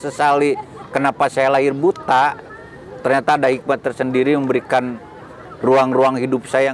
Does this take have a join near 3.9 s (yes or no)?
no